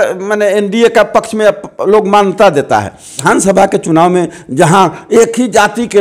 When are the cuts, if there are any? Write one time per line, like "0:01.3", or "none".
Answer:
0:03.2